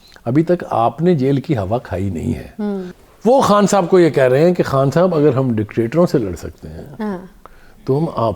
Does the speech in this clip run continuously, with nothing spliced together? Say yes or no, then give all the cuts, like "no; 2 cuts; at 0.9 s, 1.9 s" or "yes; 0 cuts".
no; 1 cut; at 3.0 s